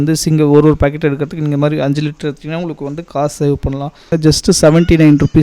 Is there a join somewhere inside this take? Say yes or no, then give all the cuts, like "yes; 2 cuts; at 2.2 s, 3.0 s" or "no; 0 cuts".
yes; 1 cut; at 4.1 s